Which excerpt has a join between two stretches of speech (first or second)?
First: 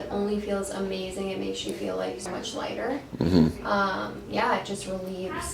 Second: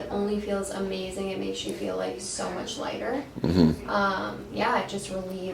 first